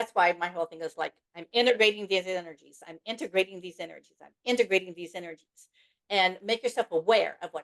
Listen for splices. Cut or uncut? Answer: uncut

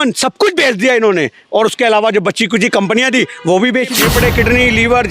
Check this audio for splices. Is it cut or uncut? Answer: cut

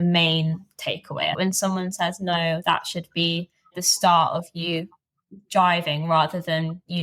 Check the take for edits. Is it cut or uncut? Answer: cut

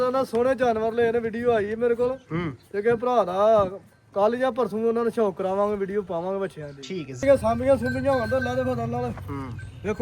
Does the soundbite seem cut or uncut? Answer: cut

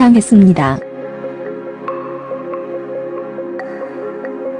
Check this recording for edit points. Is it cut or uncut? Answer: cut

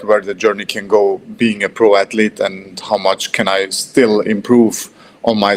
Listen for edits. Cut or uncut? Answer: uncut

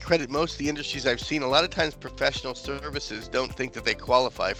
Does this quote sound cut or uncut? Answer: uncut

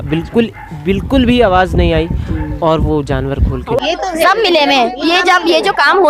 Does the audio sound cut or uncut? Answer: cut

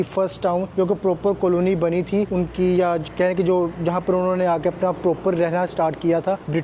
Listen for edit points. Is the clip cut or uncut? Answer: uncut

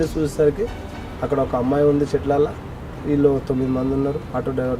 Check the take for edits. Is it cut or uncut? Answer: uncut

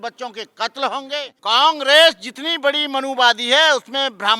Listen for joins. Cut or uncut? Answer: cut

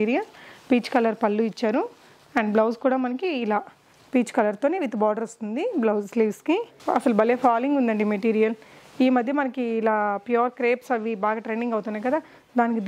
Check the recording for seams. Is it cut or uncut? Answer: cut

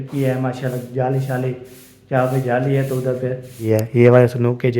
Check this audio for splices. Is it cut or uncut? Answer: cut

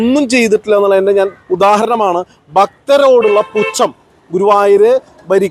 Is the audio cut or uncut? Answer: uncut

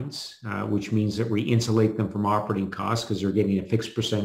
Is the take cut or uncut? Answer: uncut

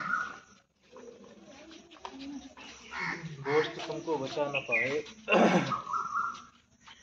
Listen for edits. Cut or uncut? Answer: uncut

